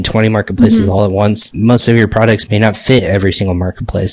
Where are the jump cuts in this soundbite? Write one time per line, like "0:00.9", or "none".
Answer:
0:02.4